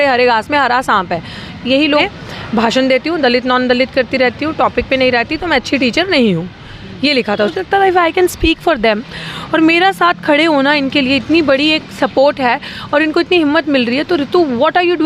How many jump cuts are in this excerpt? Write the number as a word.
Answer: two